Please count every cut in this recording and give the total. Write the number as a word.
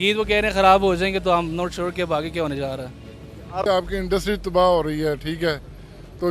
one